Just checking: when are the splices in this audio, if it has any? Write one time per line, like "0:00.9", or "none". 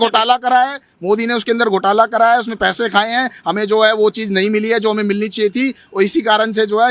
none